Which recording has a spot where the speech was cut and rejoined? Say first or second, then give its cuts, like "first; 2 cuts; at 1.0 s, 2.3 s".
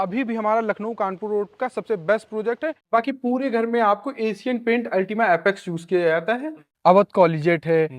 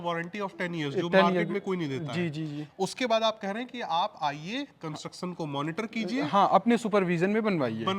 first; 2 cuts; at 2.9 s, 6.7 s